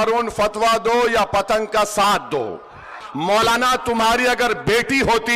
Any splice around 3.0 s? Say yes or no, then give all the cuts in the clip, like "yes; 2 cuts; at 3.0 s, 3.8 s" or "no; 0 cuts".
yes; 1 cut; at 3.0 s